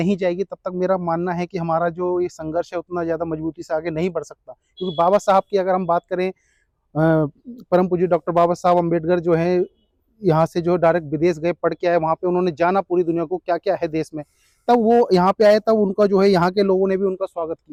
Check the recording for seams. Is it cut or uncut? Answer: uncut